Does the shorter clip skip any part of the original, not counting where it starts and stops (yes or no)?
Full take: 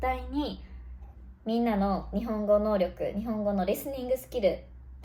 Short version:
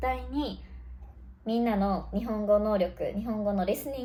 no